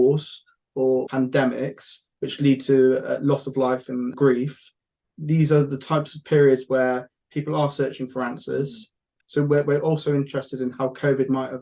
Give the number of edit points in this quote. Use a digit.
3